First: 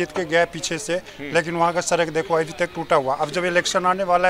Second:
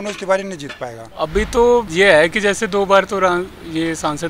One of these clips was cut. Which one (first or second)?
second